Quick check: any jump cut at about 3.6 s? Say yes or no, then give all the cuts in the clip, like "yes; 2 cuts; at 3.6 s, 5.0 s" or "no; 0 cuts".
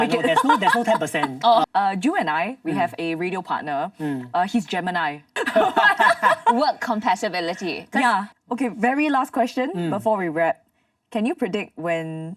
no; 3 cuts; at 1.6 s, 5.3 s, 8.3 s